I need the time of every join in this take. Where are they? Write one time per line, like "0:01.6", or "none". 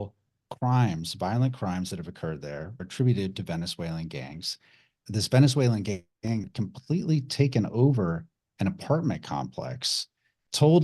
0:02.9
0:05.0